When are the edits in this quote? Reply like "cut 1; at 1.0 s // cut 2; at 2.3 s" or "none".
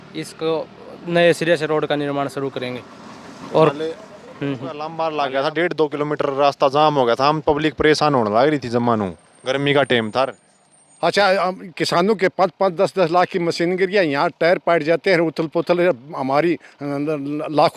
cut 1; at 4.8 s